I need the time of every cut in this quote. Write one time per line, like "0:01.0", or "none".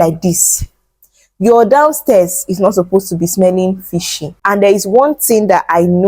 0:04.3